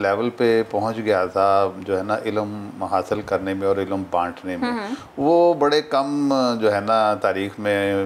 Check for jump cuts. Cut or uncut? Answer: uncut